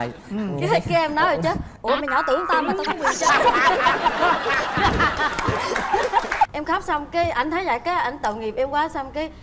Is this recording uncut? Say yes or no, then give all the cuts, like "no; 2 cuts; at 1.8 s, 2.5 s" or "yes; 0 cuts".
no; 1 cut; at 6.5 s